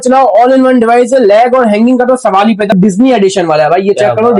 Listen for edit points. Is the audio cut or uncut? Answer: cut